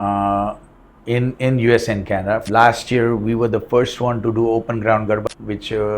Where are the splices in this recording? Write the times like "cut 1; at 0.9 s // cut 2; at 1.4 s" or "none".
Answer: cut 1; at 2.4 s // cut 2; at 5.2 s